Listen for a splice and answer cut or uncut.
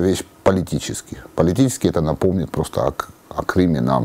uncut